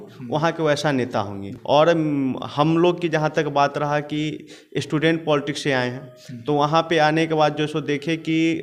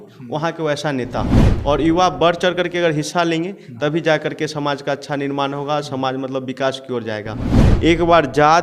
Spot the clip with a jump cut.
second; 2 cuts; at 1.4 s, 7.6 s

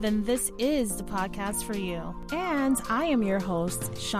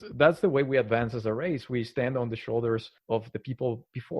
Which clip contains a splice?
second; 1 cut; at 2.9 s

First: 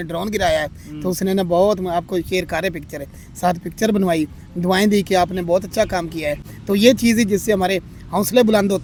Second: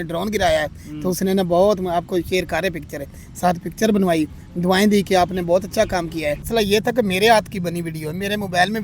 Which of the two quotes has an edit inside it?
second; 1 cut; at 6.5 s

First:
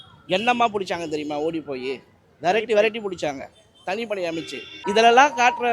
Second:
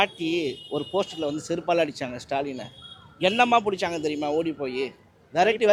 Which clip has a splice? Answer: first; 1 cut; at 4.8 s

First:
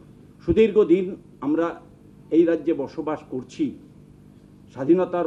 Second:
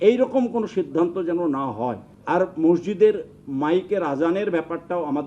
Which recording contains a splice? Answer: second; 1 cut; at 2.1 s

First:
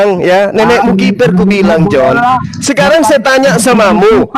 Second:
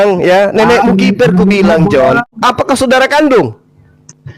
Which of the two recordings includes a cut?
second; 1 cut; at 2.2 s

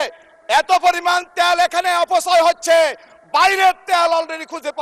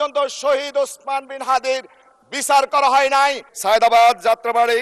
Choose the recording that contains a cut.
second; 1 cut; at 3.5 s

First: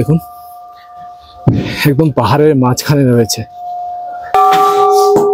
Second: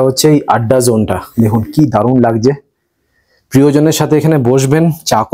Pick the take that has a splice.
first; 1 cut; at 4.2 s

